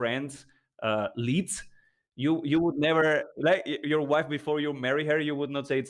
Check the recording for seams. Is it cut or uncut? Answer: uncut